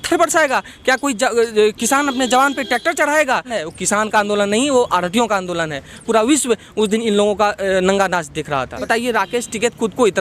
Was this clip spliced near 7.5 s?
no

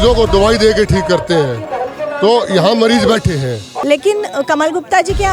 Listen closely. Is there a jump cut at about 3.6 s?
yes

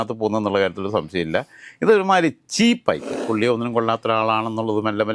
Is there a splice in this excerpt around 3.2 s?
yes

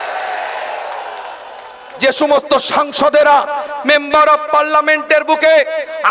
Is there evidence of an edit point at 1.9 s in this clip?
yes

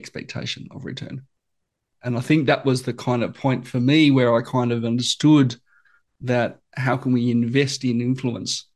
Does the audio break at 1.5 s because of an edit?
yes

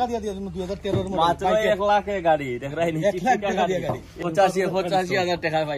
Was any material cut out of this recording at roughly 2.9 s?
no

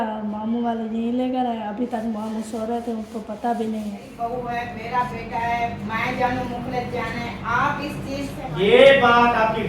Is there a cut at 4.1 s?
yes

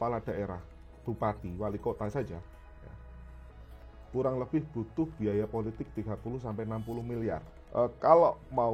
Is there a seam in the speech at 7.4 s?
yes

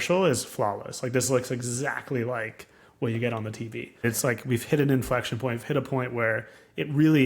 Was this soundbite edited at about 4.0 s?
yes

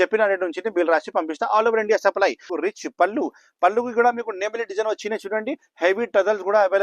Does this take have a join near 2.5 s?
yes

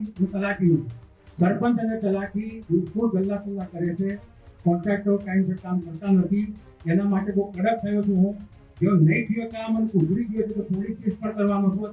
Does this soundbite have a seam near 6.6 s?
no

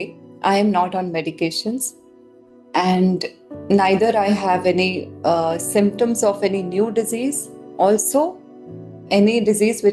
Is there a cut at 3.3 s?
no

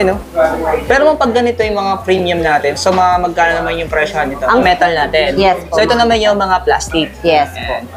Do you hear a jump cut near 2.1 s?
no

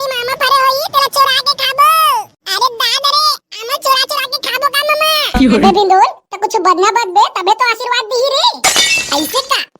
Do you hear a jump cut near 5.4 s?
yes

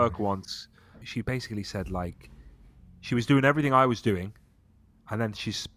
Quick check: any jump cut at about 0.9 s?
yes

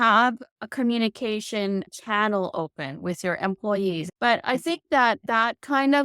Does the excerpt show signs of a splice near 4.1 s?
yes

